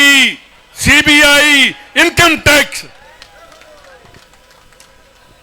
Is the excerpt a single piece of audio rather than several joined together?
yes; 0 cuts

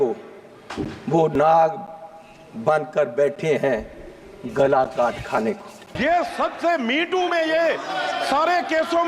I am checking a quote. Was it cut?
yes; 1 cut; at 5.9 s

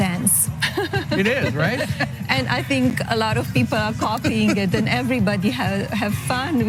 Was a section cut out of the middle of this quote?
no; 0 cuts

